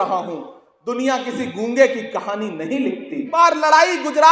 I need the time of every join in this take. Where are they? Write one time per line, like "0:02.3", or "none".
0:03.3